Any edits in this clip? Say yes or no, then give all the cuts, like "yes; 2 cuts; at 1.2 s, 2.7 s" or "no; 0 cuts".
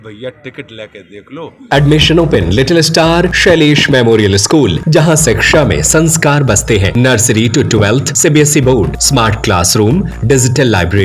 yes; 7 cuts; at 1.7 s, 3.3 s, 4.8 s, 6.9 s, 8.1 s, 9.0 s, 10.1 s